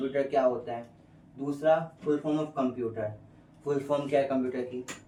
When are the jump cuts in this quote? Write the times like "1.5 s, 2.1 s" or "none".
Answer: none